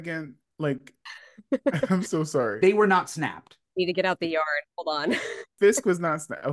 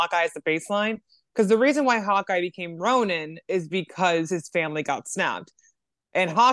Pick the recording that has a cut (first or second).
first